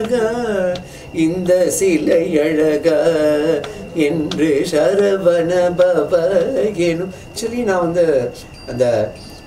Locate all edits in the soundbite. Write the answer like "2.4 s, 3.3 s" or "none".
7.3 s